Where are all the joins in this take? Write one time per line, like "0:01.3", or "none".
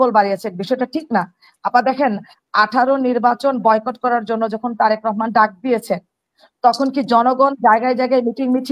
none